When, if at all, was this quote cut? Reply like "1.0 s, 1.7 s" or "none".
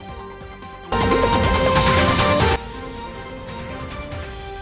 0.9 s